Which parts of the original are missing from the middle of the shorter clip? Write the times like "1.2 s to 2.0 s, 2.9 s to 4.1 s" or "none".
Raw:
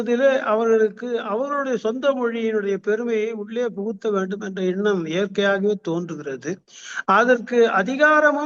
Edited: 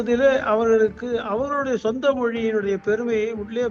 none